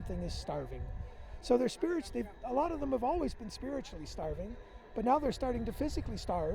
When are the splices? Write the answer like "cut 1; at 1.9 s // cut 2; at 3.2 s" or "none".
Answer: none